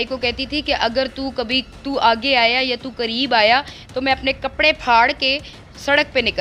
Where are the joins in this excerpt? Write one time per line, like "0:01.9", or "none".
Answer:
none